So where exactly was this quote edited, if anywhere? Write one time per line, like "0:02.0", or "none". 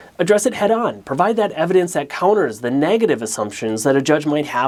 none